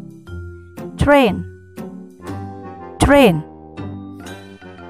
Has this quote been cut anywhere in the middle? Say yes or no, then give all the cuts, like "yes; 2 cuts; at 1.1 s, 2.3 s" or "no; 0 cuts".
yes; 2 cuts; at 1.4 s, 3.0 s